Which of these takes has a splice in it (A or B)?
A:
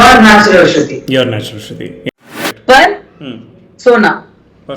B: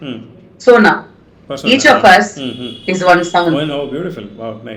A